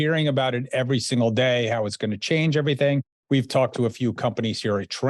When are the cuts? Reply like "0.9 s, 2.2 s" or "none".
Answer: 3.1 s